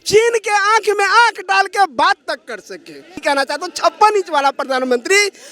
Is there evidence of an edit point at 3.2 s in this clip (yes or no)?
yes